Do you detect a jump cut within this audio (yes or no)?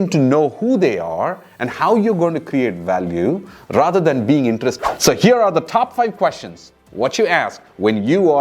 yes